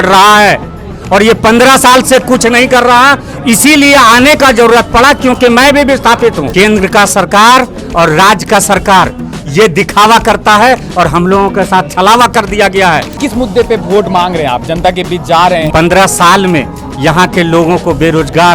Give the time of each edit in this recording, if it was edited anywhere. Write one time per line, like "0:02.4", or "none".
0:06.4
0:13.2
0:15.7